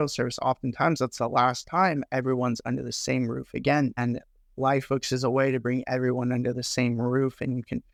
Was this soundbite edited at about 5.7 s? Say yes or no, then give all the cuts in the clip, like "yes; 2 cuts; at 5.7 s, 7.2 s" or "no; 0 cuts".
no; 0 cuts